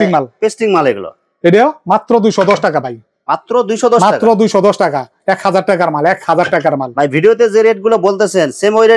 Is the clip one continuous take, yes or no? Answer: yes